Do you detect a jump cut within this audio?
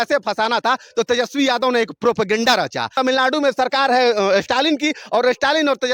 yes; 1 cut; at 2.9 s

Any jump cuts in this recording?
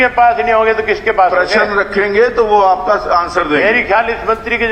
no; 0 cuts

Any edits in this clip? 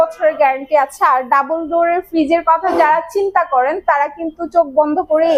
no; 0 cuts

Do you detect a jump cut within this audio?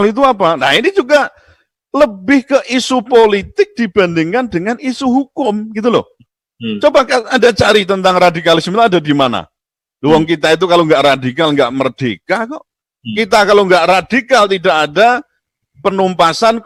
no; 0 cuts

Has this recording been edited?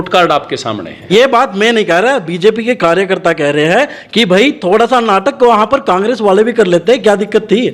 yes; 1 cut; at 1.1 s

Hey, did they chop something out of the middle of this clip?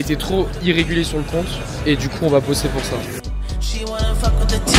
no; 0 cuts

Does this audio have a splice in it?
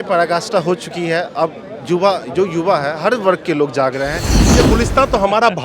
yes; 1 cut; at 4.5 s

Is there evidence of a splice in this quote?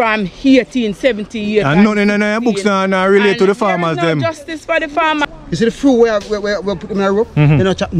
yes; 1 cut; at 5.3 s

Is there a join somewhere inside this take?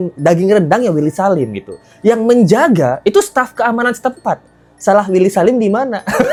no; 0 cuts

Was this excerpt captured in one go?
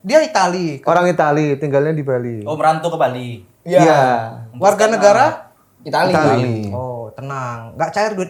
yes; 0 cuts

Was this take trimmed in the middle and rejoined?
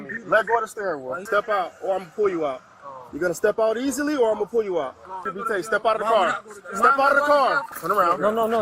yes; 3 cuts; at 1.1 s, 5.3 s, 7.7 s

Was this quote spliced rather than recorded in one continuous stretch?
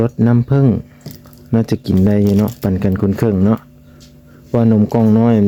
no; 0 cuts

